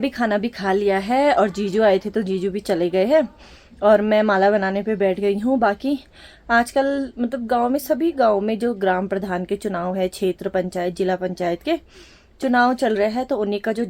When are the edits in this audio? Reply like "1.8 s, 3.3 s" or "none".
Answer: none